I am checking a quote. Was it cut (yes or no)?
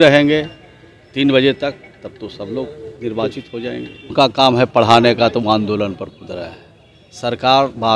yes